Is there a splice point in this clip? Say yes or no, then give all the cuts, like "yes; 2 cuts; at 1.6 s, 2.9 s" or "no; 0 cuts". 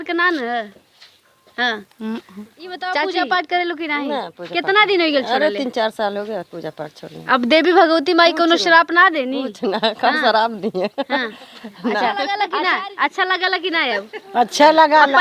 yes; 2 cuts; at 3.0 s, 12.4 s